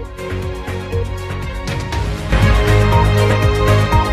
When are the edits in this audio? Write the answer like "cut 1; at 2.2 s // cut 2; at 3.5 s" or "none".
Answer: none